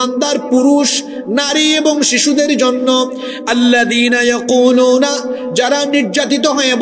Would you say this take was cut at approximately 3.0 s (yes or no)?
no